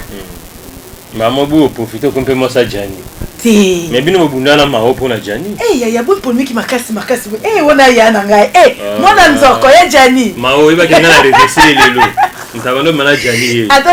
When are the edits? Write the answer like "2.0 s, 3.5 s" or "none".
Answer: none